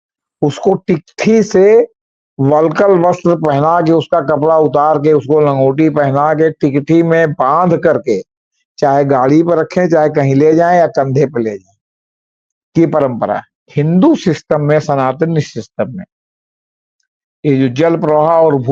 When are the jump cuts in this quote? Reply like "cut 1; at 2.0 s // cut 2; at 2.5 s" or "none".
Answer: cut 1; at 13.6 s